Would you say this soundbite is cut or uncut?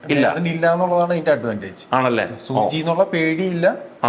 uncut